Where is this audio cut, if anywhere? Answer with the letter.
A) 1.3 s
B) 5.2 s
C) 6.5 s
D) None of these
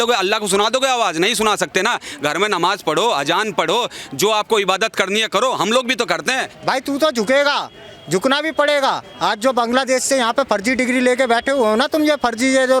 C